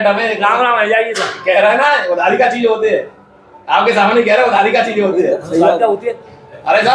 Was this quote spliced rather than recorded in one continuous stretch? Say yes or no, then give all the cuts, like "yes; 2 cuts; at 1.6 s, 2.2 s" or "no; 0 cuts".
no; 0 cuts